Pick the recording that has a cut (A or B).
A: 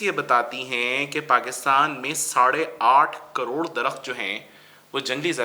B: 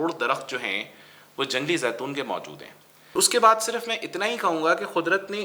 B